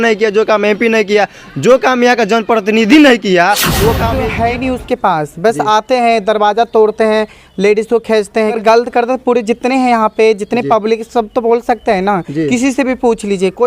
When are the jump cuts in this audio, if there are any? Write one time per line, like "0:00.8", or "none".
0:04.1
0:08.6